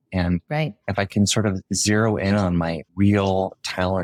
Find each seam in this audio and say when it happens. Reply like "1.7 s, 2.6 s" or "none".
none